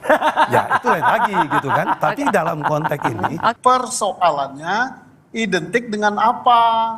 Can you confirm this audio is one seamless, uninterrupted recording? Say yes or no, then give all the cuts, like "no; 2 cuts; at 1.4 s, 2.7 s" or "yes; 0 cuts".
no; 1 cut; at 3.6 s